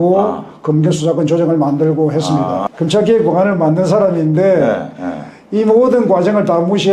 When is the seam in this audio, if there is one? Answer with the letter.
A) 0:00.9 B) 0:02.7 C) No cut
B